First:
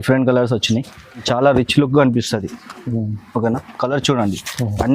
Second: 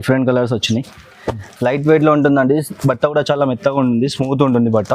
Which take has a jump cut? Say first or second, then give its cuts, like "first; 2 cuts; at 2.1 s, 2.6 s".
first; 1 cut; at 1.2 s